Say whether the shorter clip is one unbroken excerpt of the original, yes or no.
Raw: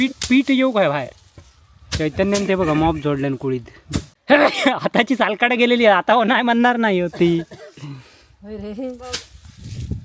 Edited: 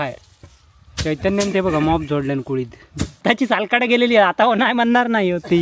no